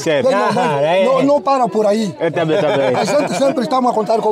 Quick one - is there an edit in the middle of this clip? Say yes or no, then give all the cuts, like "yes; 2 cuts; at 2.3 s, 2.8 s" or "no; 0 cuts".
no; 0 cuts